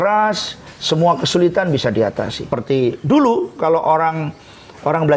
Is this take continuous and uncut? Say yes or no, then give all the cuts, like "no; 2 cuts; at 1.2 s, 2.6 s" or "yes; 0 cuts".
no; 1 cut; at 2.6 s